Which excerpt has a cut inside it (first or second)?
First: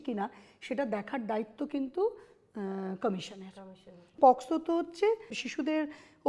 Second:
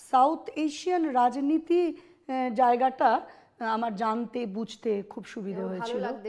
first